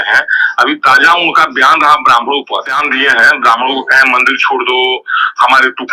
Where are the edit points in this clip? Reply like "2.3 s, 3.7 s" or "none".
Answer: 2.7 s

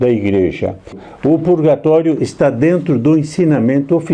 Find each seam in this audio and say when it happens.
1.0 s

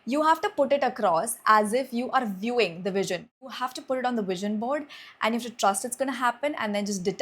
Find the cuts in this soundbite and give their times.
3.5 s

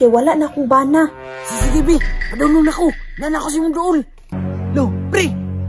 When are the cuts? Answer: 4.3 s

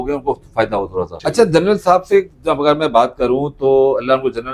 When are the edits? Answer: 1.1 s

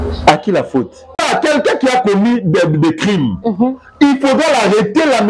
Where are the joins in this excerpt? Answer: 1.2 s

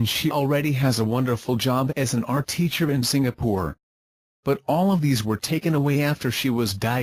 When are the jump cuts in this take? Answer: 1.9 s, 5.8 s

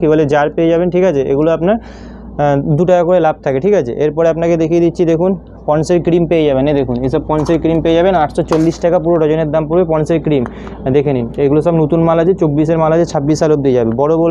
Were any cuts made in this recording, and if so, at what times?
none

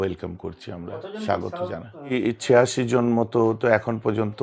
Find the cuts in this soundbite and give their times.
2.1 s

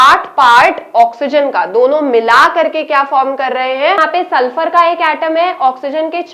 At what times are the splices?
4.0 s

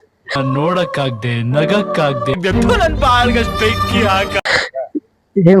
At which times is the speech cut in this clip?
2.4 s

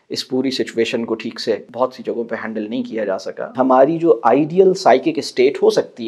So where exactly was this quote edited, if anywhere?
1.7 s, 3.5 s

